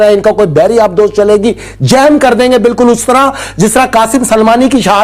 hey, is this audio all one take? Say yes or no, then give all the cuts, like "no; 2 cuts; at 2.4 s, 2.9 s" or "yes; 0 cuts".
yes; 0 cuts